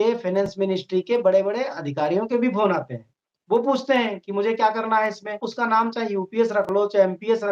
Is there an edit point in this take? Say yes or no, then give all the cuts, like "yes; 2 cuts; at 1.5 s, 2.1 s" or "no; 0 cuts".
yes; 1 cut; at 5.5 s